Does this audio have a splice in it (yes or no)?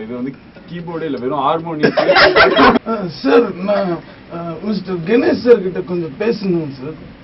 yes